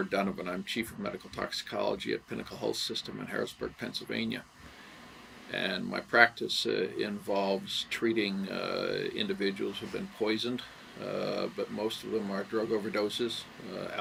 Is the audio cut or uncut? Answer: uncut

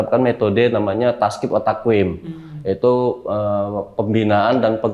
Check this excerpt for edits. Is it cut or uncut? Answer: uncut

